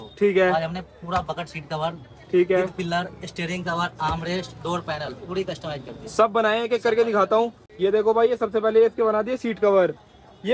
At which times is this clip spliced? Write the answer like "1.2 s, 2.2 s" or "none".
none